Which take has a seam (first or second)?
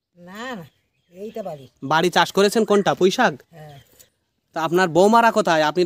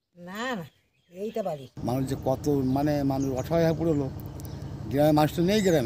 second